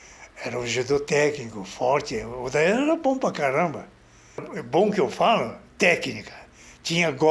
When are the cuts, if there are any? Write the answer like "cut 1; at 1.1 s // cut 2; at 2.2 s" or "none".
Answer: cut 1; at 4.5 s